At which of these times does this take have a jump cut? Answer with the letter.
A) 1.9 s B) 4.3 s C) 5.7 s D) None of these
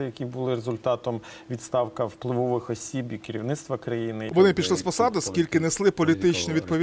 B